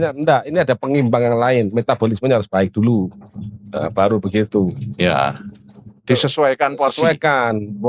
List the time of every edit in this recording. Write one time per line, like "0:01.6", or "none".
none